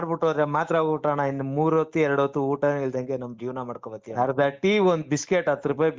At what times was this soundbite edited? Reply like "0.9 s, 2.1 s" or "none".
4.1 s